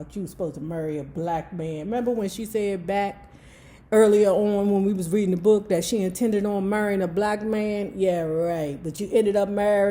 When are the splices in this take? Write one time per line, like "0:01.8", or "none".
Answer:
none